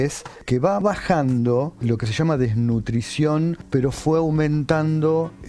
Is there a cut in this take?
yes; 3 cuts; at 0.8 s, 1.8 s, 3.6 s

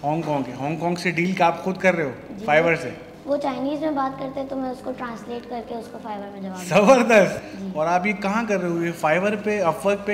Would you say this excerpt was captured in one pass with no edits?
no; 1 cut; at 7.4 s

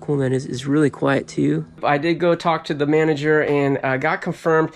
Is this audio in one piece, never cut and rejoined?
no; 1 cut; at 1.8 s

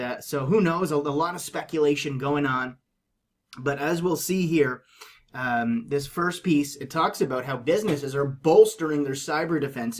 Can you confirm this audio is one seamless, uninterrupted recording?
yes; 0 cuts

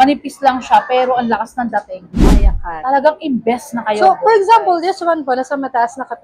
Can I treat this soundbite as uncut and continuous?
no; 1 cut; at 2.2 s

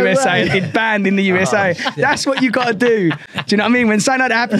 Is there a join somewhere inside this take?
no; 0 cuts

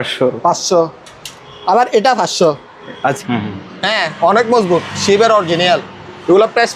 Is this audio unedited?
no; 1 cut; at 3.2 s

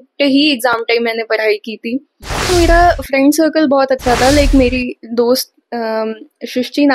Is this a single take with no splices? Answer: no; 1 cut; at 2.5 s

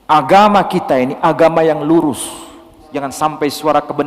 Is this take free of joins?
no; 1 cut; at 3.1 s

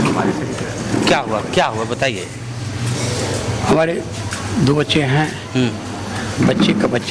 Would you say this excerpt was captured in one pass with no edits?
yes; 0 cuts

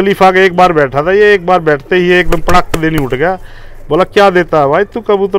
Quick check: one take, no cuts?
yes; 0 cuts

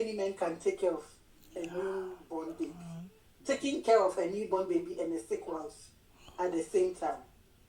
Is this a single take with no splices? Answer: no; 1 cut; at 3.3 s

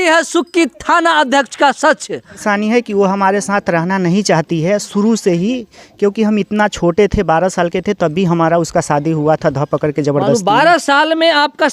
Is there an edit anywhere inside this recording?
yes; 1 cut; at 2.4 s

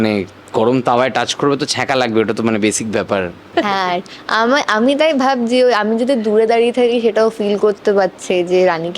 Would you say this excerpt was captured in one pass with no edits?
no; 1 cut; at 3.4 s

